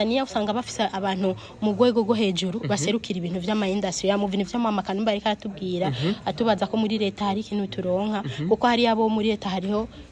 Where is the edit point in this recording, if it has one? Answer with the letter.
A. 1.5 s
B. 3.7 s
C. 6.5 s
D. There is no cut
D